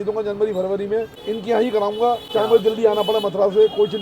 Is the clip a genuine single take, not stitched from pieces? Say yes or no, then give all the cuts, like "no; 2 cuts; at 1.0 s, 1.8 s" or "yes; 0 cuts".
no; 2 cuts; at 1.1 s, 2.2 s